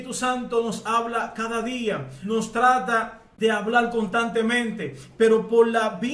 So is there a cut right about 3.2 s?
yes; 2 cuts; at 2.1 s, 3.2 s

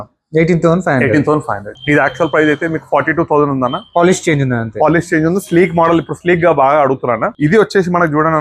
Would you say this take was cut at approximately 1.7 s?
yes; 1 cut; at 1.7 s

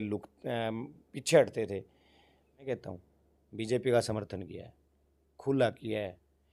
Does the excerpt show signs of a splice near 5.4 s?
no; 1 cut; at 2.7 s

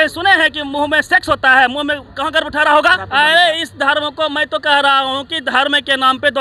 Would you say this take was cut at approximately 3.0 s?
yes; 1 cut; at 3.0 s

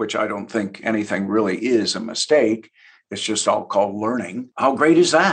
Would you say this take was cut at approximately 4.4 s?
yes; 1 cut; at 4.4 s

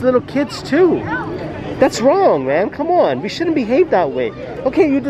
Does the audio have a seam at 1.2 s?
no; 0 cuts

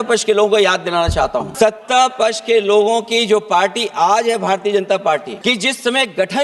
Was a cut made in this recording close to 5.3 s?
yes; 2 cuts; at 1.5 s, 5.3 s

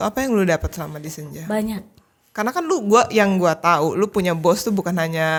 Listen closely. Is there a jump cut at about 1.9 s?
no; 0 cuts

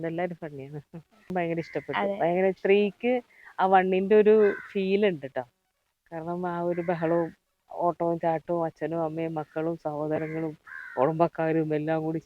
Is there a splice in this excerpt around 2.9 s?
no; 1 cut; at 1.3 s

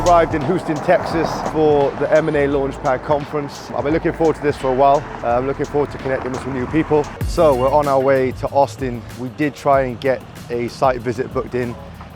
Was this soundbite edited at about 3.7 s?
yes; 5 cuts; at 1.4 s, 3.7 s, 5.1 s, 7.2 s, 9.2 s

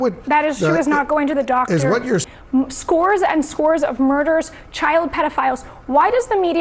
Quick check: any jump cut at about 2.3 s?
yes; 1 cut; at 2.3 s

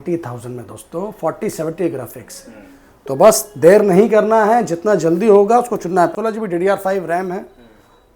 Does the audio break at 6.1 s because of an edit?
yes; 1 cut; at 6.1 s

